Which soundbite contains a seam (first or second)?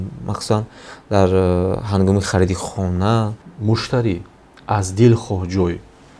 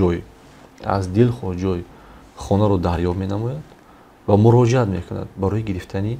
first